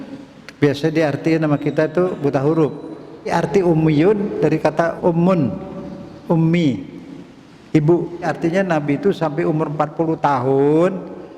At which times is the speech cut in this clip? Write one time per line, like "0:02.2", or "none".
0:03.3
0:05.0
0:08.2